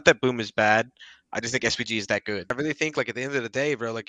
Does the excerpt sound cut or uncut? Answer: cut